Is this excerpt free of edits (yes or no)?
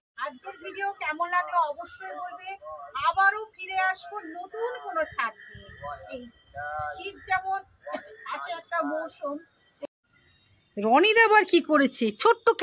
no